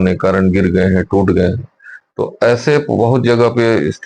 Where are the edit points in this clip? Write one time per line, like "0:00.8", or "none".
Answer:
none

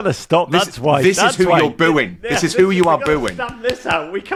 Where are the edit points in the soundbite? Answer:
none

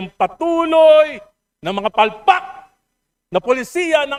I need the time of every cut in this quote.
none

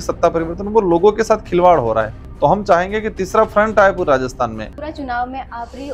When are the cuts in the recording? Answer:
0:02.2
0:04.7

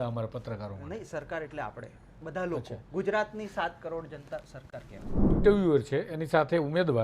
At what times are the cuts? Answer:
0:05.4

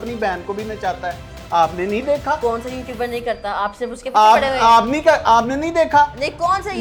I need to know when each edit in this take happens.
none

